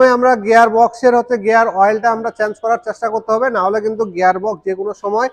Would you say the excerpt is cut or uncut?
uncut